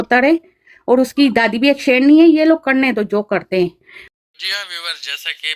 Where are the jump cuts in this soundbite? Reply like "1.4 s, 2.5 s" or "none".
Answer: none